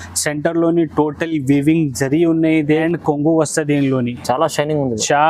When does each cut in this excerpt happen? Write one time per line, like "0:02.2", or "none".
0:02.8